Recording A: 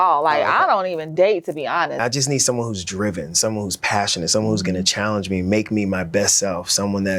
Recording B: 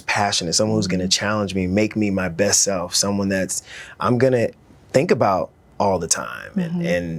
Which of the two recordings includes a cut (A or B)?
A